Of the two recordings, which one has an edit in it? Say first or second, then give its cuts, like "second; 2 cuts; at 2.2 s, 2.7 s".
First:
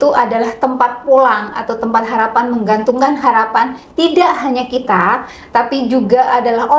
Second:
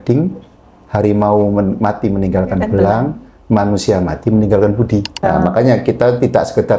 second; 1 cut; at 5.1 s